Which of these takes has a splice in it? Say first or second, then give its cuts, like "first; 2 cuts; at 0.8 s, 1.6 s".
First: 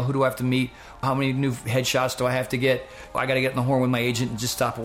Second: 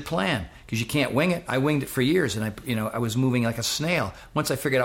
first; 2 cuts; at 1.0 s, 3.1 s